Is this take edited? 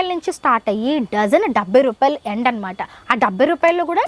no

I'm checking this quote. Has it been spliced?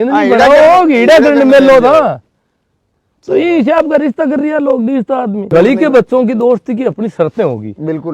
yes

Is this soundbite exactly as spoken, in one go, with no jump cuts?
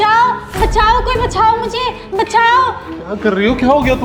yes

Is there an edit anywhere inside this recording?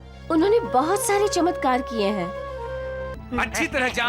yes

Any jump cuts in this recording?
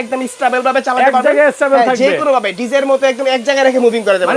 no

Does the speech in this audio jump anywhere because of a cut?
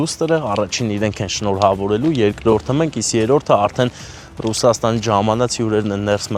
no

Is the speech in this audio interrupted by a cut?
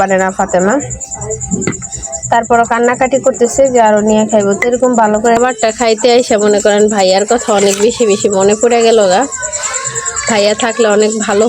yes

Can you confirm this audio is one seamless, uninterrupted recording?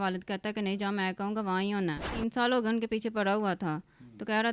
no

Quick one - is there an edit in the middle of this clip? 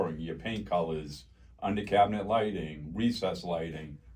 no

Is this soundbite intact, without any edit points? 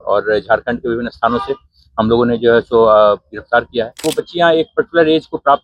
no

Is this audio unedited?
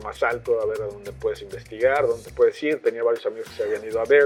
yes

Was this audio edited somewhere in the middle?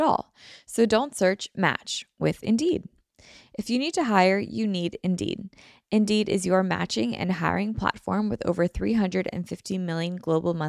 no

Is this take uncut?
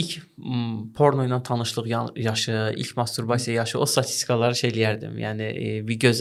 yes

